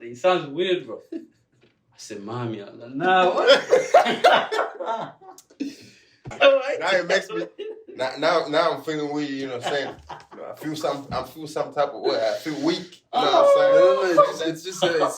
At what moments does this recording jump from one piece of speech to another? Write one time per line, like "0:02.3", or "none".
0:06.2